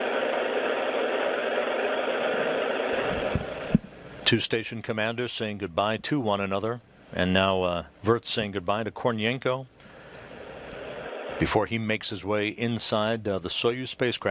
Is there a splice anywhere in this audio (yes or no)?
no